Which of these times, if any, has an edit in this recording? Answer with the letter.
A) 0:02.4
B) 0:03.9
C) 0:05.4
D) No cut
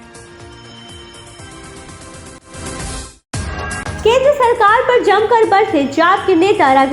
A